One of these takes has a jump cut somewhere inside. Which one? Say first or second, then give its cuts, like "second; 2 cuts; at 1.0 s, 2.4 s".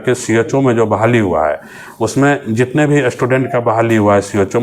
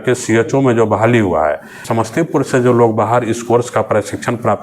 second; 1 cut; at 1.9 s